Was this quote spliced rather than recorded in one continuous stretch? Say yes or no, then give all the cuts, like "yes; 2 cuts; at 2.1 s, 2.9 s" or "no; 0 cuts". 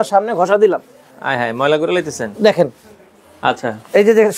no; 0 cuts